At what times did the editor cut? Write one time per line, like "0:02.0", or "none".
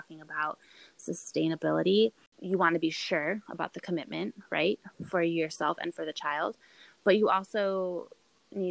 0:02.3